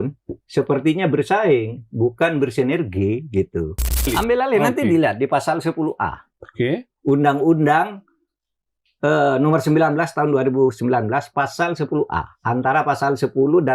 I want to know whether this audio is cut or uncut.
cut